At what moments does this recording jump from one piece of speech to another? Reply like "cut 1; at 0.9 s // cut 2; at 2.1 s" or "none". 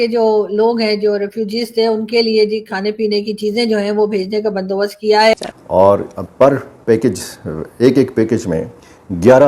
cut 1; at 5.3 s